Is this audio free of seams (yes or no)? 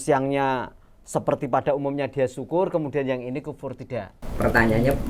no